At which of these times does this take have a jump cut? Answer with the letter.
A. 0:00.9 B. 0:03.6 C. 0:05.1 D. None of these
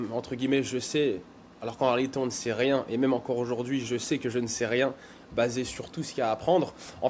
D